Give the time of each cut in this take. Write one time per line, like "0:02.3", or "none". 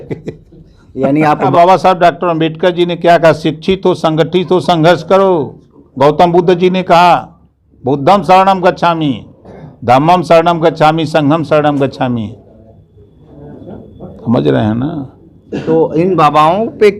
0:01.5